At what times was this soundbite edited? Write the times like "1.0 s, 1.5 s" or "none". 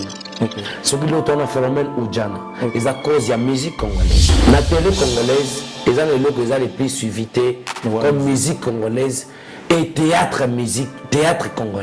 4.2 s